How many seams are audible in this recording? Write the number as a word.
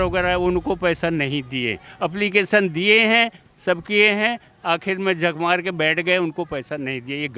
zero